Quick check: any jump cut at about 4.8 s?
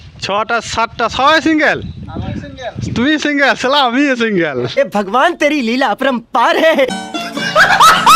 yes; 2 cuts; at 4.8 s, 7.0 s

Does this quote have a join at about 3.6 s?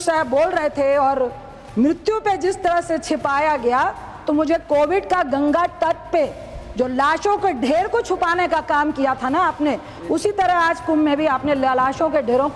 no; 0 cuts

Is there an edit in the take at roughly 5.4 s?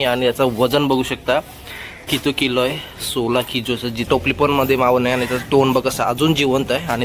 no; 1 cut; at 4.1 s

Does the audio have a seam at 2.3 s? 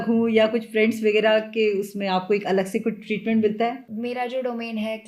no; 1 cut; at 3.8 s

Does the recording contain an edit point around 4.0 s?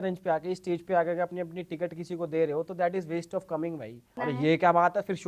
yes; 1 cut; at 4.0 s

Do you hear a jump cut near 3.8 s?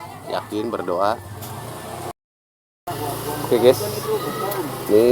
no; 1 cut; at 2.1 s

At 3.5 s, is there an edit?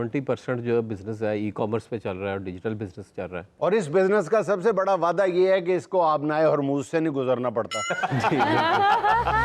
yes; 1 cut; at 3.5 s

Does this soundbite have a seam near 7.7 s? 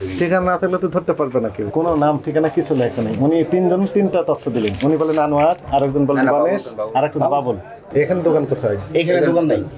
yes; 2 cuts; at 1.6 s, 7.7 s

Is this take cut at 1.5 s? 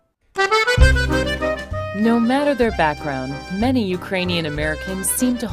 no; 1 cut; at 3.9 s

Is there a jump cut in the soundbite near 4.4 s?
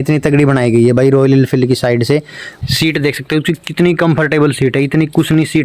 no; 1 cut; at 2.5 s

